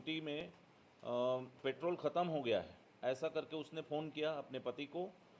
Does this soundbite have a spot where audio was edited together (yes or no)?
no